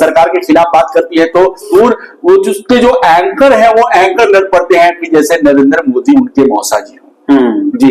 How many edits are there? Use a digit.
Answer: 1